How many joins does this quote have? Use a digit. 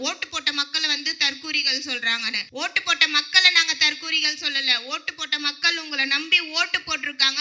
1